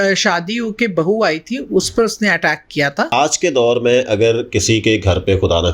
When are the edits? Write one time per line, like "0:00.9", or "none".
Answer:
0:03.1